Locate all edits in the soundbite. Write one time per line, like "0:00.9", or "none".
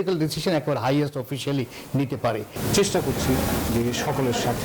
0:02.5